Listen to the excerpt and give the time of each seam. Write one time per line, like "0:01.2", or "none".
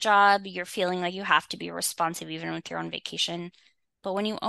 0:01.9